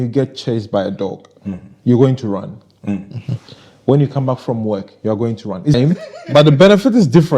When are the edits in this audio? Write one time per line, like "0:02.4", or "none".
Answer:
0:05.8